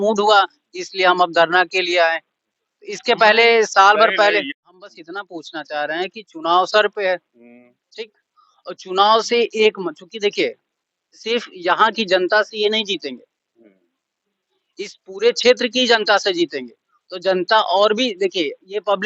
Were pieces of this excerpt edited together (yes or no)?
yes